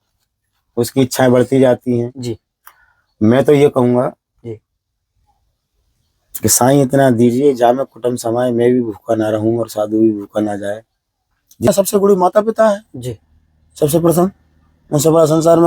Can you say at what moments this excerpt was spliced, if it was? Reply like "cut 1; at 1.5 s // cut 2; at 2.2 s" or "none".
cut 1; at 11.7 s